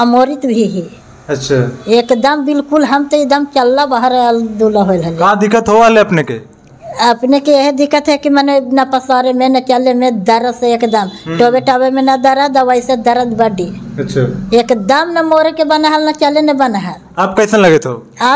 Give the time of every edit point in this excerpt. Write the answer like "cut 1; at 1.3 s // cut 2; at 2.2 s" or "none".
none